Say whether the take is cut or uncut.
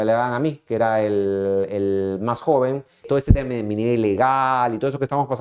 cut